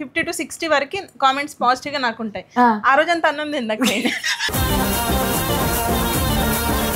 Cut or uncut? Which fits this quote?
uncut